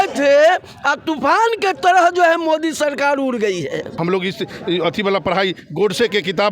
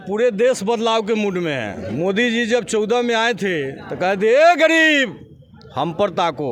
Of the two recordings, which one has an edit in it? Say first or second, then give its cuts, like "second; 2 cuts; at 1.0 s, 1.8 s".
first; 1 cut; at 3.9 s